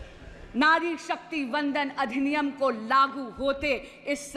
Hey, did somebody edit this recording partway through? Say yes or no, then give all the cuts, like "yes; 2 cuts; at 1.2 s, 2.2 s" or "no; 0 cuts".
no; 0 cuts